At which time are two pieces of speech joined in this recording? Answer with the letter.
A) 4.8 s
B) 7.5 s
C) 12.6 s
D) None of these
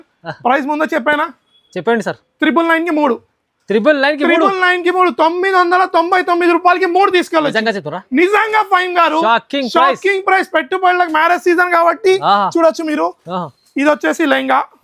D